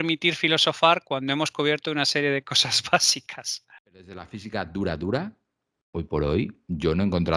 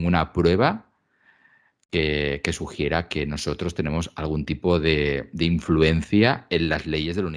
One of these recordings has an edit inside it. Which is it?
first; 1 cut; at 3.9 s

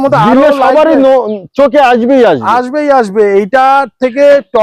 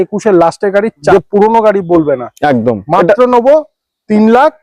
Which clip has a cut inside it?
second; 1 cut; at 1.1 s

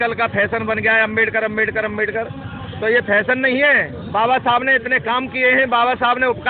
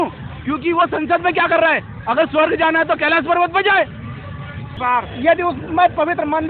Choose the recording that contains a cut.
second; 1 cut; at 4.6 s

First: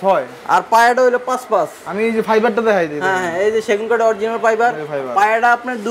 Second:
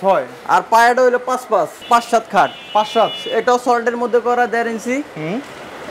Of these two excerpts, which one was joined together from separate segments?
second; 1 cut; at 1.8 s

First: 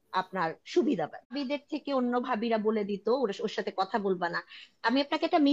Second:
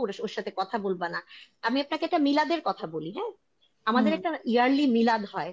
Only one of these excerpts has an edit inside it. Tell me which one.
first; 1 cut; at 1.4 s

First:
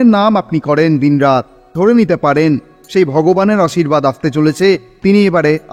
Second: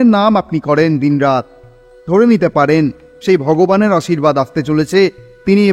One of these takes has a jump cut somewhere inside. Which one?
first; 2 cuts; at 1.6 s, 4.9 s

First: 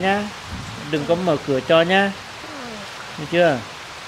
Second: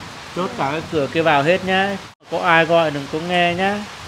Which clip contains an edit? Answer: second; 1 cut; at 2.3 s

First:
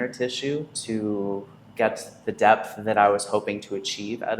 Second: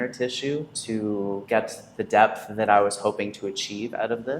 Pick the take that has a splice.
second; 1 cut; at 1.4 s

